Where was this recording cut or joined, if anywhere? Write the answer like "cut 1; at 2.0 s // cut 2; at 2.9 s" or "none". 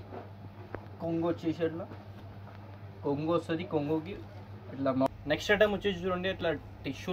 cut 1; at 5.1 s